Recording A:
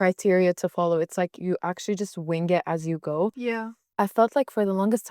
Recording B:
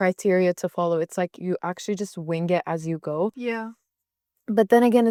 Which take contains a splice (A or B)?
A